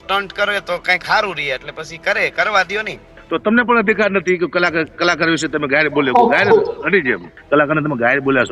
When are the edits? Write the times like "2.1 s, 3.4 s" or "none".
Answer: 3.2 s, 7.3 s